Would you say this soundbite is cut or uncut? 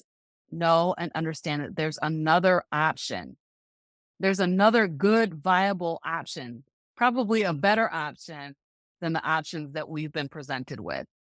uncut